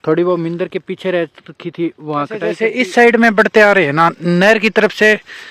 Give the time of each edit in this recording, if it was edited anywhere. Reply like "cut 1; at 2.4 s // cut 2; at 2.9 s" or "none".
cut 1; at 2.6 s